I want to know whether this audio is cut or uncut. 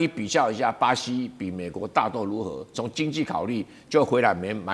uncut